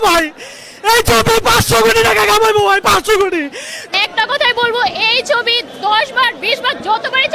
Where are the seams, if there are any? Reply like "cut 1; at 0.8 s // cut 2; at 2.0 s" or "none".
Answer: cut 1; at 3.9 s